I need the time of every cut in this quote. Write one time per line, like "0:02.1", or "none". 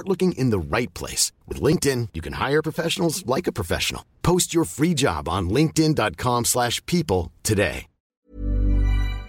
0:08.3